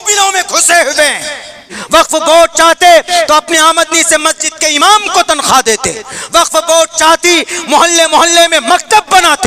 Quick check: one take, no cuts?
no; 1 cut; at 1.7 s

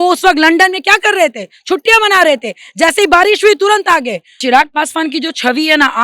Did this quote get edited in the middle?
yes; 1 cut; at 4.4 s

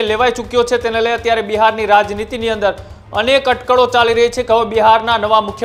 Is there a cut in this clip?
no; 0 cuts

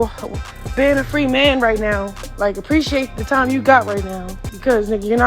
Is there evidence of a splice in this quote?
yes; 1 cut; at 2.2 s

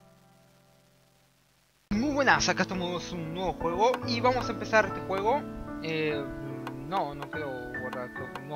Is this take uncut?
yes; 0 cuts

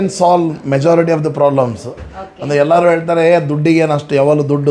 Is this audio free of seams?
yes; 0 cuts

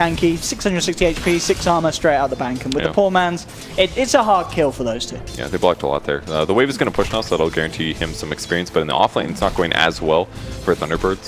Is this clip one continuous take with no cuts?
yes; 0 cuts

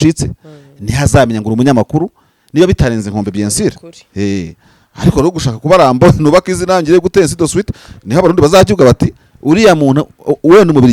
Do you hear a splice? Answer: no; 0 cuts

